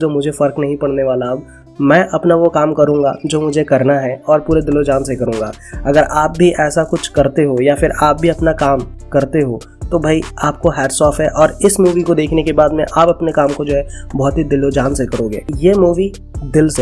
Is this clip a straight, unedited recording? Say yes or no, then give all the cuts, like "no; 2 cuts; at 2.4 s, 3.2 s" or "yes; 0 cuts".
no; 1 cut; at 15.5 s